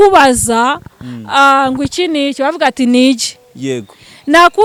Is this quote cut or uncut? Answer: uncut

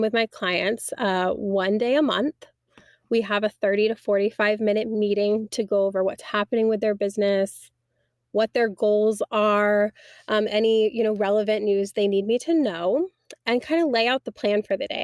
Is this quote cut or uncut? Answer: uncut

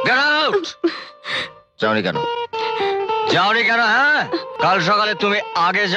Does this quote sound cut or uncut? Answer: cut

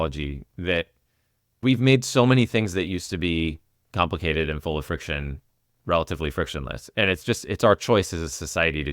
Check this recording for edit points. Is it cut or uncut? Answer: cut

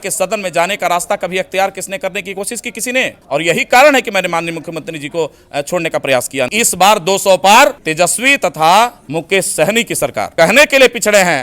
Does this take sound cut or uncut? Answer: cut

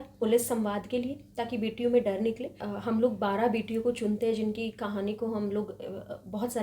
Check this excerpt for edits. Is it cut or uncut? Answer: cut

